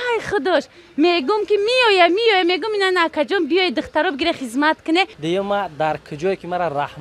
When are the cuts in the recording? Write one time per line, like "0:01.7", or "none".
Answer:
0:05.2